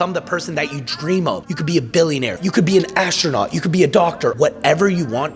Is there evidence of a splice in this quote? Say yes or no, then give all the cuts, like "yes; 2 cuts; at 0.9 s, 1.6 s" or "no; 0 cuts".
yes; 3 cuts; at 1.5 s, 2.4 s, 4.3 s